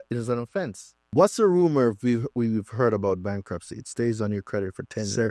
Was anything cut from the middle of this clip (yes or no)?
yes